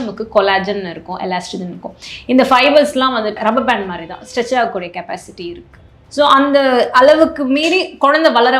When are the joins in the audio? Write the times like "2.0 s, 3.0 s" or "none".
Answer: 3.3 s